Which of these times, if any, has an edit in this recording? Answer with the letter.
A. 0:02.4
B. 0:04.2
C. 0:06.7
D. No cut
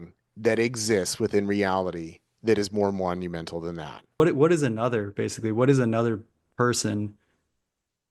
B